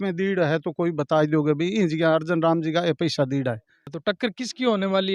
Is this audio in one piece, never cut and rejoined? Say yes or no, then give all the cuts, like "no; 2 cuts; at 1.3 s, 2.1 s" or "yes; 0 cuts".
no; 1 cut; at 4.0 s